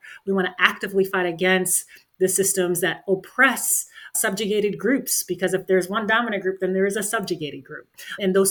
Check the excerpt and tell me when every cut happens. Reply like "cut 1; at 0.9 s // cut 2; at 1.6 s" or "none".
none